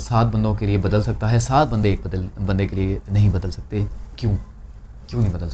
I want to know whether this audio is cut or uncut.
uncut